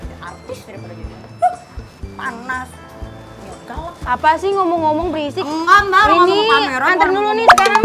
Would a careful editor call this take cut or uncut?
uncut